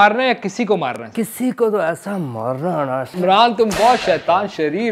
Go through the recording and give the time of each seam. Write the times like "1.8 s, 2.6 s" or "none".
1.0 s, 3.1 s